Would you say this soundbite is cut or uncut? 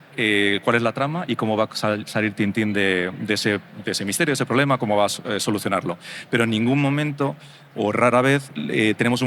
uncut